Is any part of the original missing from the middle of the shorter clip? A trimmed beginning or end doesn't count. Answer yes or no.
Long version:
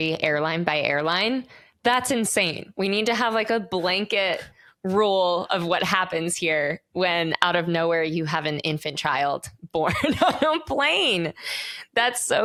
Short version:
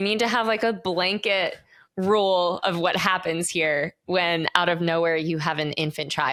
no